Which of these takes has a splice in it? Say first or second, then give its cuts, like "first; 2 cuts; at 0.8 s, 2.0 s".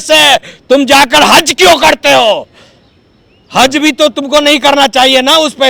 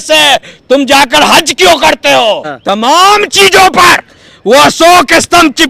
second; 1 cut; at 2.5 s